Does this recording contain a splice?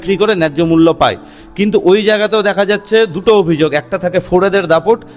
no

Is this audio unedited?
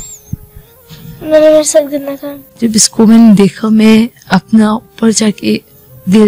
no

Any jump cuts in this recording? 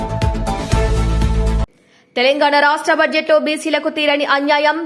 yes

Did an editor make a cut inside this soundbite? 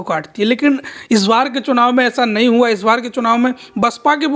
no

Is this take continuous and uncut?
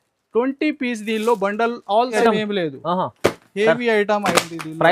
no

